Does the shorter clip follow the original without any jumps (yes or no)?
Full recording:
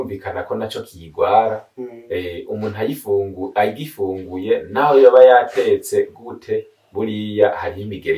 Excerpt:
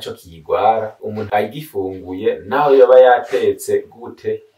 no